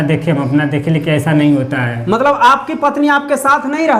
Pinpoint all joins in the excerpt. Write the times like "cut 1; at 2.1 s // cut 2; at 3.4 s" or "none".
none